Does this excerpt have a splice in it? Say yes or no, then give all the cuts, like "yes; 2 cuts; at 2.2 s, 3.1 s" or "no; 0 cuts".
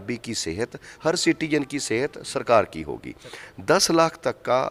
no; 0 cuts